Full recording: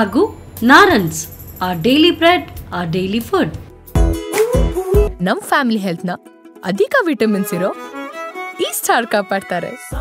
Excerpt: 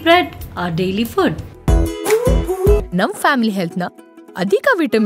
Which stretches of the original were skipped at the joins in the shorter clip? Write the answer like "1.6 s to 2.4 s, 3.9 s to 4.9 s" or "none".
3.7 s to 3.8 s